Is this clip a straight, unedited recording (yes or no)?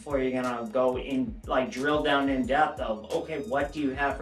yes